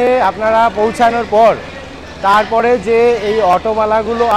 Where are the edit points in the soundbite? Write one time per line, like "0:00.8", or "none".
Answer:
none